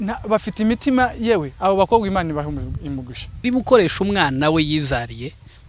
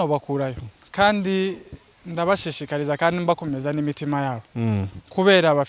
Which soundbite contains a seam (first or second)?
first